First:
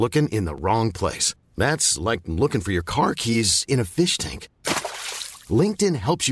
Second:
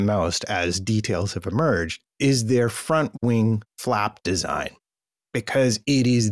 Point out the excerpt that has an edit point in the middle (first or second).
second